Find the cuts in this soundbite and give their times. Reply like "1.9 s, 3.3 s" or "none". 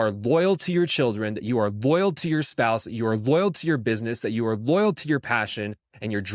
none